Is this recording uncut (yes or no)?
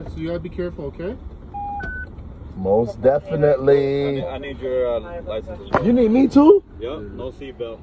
yes